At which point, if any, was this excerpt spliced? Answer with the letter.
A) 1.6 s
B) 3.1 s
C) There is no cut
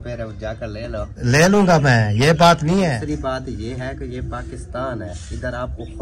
B